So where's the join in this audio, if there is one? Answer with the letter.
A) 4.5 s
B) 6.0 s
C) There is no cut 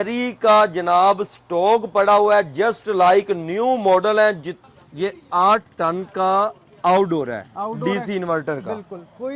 A